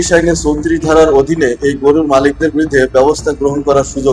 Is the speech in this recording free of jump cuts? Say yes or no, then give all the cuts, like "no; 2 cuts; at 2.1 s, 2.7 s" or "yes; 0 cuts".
yes; 0 cuts